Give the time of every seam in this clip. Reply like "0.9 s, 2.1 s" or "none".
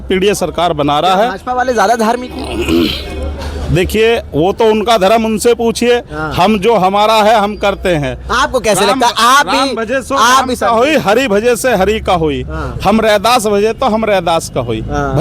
none